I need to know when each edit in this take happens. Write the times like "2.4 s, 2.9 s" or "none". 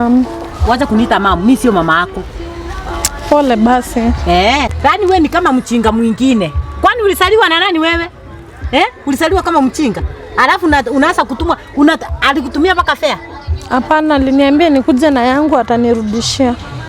4.7 s